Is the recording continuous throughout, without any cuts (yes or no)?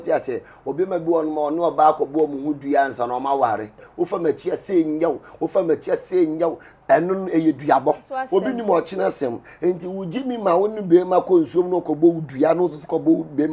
no